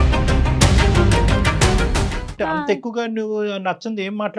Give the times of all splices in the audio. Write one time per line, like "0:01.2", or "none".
0:02.2